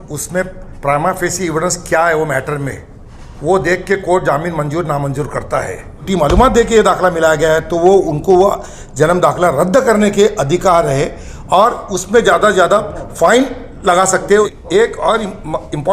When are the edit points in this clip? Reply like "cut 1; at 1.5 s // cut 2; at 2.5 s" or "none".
cut 1; at 6.0 s // cut 2; at 14.5 s